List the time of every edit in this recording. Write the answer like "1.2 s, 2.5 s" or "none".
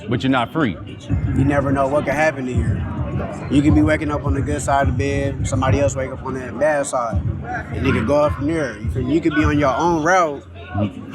1.1 s